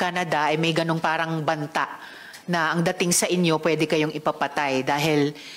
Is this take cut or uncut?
uncut